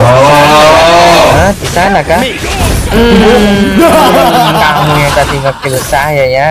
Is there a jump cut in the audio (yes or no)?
no